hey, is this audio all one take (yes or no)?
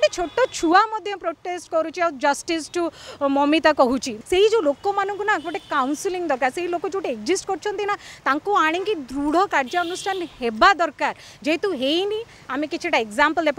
no